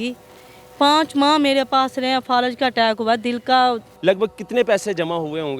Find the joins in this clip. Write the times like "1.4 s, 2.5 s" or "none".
3.9 s

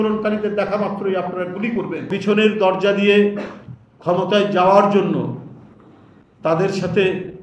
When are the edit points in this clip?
2.1 s

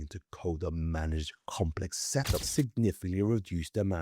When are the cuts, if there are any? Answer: 2.5 s

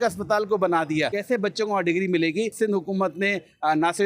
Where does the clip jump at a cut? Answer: 1.2 s, 2.5 s

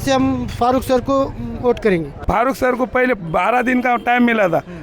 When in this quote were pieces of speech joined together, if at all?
2.3 s

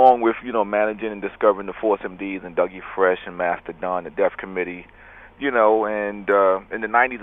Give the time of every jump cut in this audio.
5.2 s

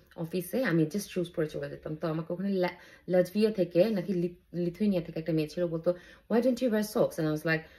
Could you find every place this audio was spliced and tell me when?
none

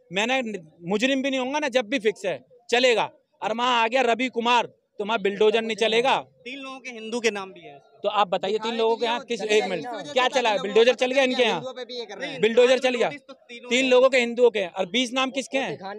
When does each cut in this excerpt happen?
none

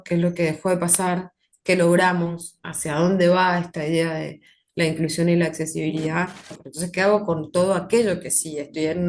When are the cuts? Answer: 6.6 s

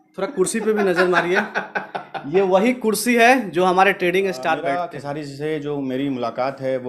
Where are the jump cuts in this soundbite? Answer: 4.7 s

